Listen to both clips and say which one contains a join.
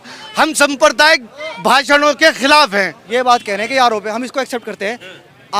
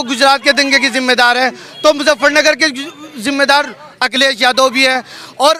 first; 1 cut; at 3.0 s

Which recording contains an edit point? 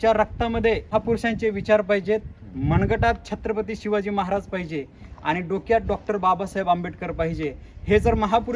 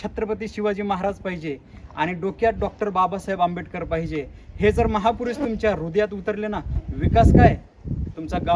first; 1 cut; at 0.9 s

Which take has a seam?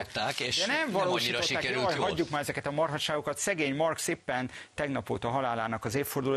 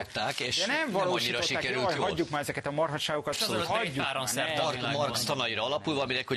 second; 1 cut; at 3.4 s

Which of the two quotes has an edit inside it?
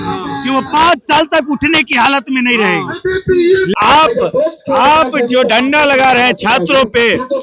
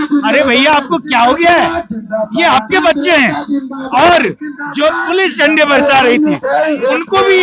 first; 1 cut; at 3.7 s

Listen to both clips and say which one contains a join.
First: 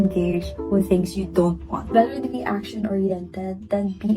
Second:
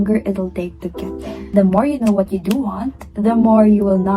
first; 1 cut; at 1.9 s

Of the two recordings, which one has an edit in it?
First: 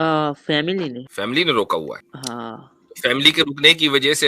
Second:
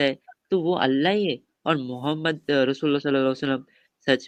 first; 2 cuts; at 1.1 s, 2.1 s

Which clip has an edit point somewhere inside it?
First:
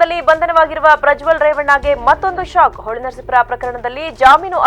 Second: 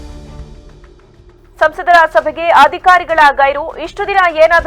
second; 1 cut; at 1.1 s

